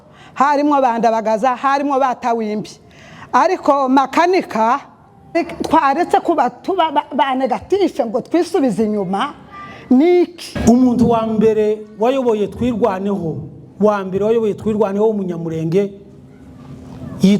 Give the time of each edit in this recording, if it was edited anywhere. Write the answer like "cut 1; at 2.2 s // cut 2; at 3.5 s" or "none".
cut 1; at 5.3 s // cut 2; at 10.5 s